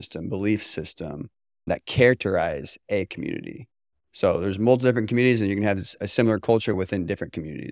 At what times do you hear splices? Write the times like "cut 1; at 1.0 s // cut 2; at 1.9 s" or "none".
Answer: cut 1; at 1.7 s // cut 2; at 6.7 s